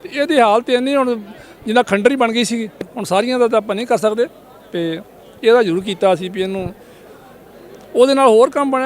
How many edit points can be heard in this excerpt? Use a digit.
1